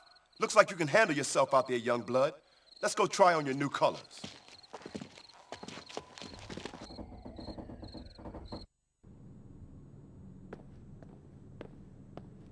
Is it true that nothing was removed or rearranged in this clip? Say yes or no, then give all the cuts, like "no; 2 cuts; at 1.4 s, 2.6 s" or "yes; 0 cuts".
yes; 0 cuts